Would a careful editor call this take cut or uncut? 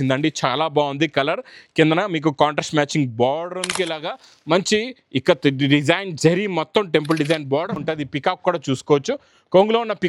cut